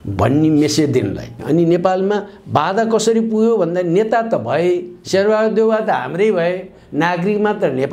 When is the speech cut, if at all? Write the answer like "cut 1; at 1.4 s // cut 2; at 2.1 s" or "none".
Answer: cut 1; at 1.3 s

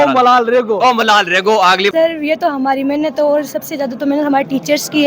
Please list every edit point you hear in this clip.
cut 1; at 1.9 s

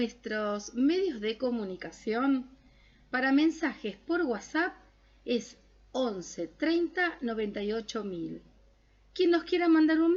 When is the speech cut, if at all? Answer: none

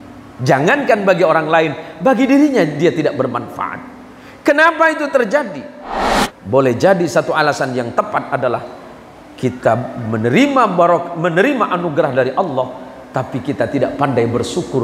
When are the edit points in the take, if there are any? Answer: none

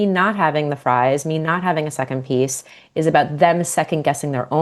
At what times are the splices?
none

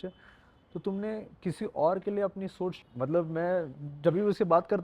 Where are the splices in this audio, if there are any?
cut 1; at 2.8 s

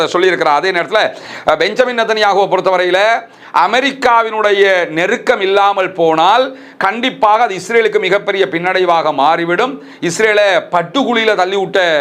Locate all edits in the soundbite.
cut 1; at 1.2 s

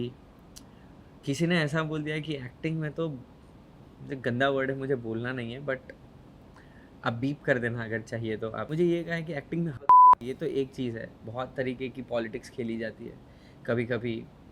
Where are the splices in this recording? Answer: cut 1; at 10.2 s

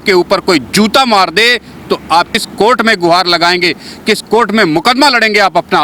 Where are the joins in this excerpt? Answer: cut 1; at 2.4 s

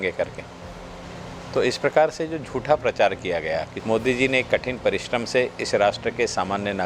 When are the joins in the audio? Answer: cut 1; at 3.7 s

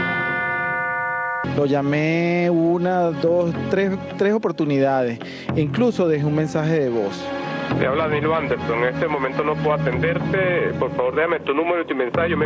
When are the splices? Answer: cut 1; at 0.9 s

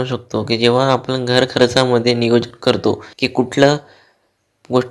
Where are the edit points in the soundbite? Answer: cut 1; at 3.1 s

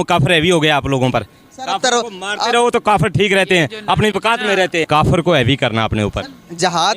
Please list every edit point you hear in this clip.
cut 1; at 4.9 s

